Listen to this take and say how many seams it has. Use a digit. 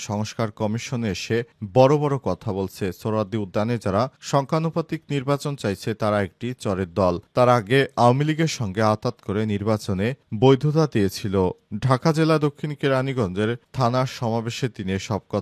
0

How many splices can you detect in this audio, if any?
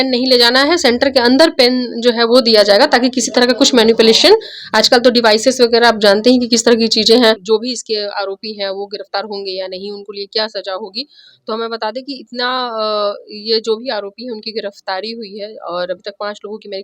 1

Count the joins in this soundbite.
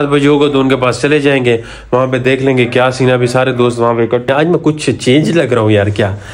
1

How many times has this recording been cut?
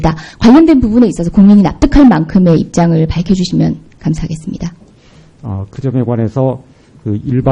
0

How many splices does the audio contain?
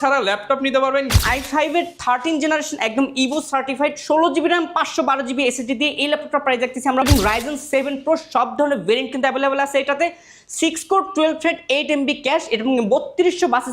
2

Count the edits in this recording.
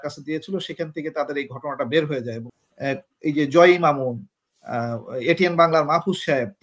1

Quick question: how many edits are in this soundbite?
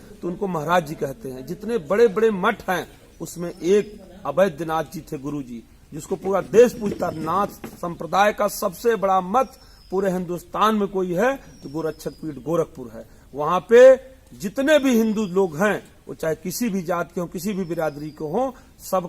0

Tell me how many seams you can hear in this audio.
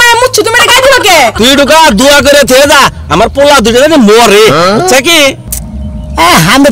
1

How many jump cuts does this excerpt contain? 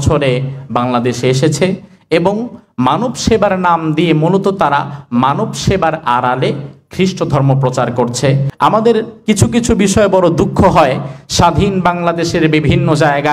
1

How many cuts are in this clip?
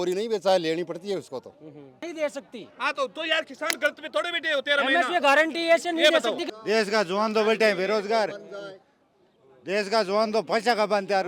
2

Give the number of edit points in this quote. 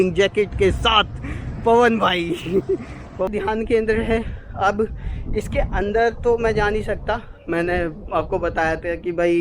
1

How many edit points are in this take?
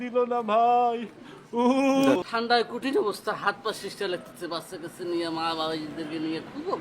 1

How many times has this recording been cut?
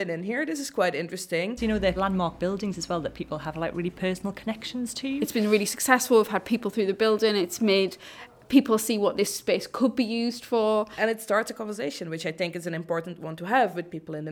3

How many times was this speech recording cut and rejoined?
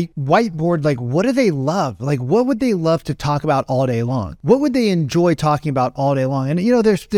0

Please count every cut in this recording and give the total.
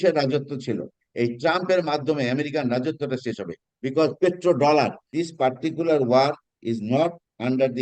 2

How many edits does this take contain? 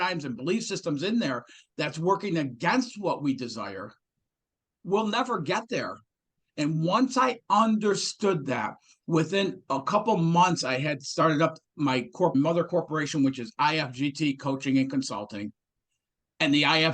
1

